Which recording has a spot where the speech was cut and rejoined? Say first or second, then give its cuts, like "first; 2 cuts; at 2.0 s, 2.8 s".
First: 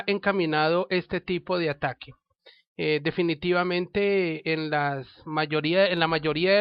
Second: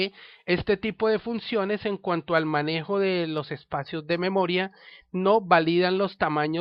second; 1 cut; at 4.9 s